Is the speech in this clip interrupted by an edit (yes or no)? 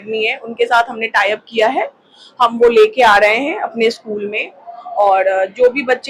no